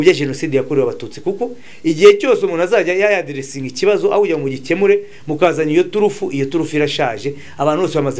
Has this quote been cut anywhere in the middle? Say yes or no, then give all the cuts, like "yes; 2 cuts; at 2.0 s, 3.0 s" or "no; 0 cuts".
no; 0 cuts